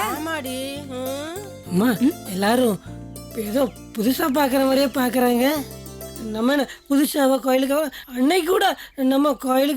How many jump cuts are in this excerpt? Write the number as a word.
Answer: zero